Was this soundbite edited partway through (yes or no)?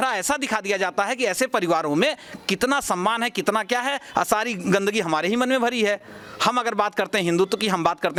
no